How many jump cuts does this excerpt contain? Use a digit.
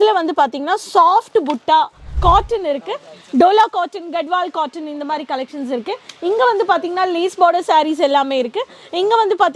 1